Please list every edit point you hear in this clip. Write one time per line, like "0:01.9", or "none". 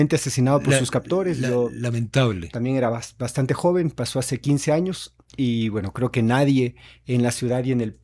none